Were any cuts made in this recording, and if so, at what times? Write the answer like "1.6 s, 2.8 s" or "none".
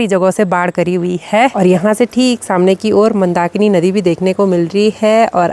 1.5 s